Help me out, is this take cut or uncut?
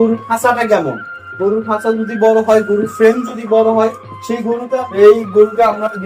cut